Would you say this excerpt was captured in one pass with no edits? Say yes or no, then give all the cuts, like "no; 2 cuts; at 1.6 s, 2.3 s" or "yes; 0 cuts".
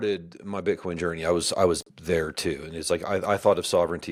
yes; 0 cuts